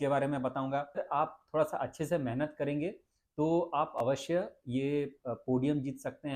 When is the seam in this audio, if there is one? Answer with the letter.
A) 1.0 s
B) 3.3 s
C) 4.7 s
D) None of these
A